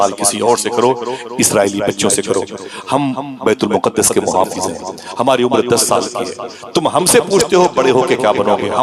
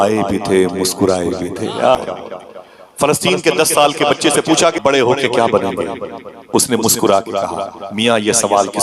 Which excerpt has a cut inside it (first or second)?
second